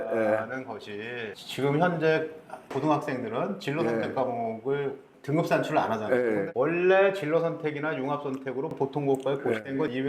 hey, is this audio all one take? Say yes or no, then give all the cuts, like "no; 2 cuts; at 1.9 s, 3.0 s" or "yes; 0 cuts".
no; 1 cut; at 6.5 s